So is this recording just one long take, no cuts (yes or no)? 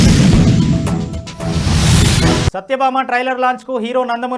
no